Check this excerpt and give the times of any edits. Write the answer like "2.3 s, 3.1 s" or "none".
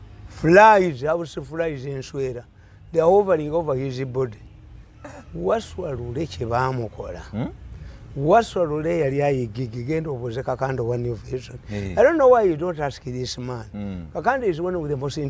none